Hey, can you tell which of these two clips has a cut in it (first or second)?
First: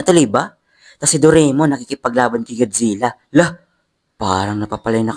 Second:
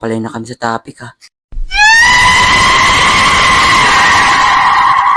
first